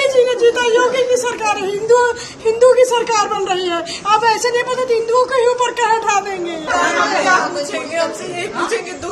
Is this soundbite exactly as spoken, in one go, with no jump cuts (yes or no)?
yes